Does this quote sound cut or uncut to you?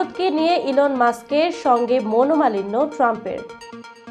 uncut